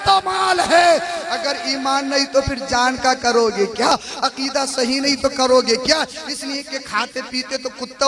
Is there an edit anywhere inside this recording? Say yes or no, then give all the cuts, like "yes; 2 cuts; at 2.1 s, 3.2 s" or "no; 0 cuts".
no; 0 cuts